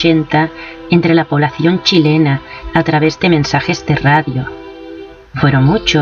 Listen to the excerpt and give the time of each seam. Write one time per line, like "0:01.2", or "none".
none